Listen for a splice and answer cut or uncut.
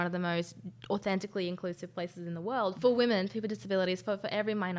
cut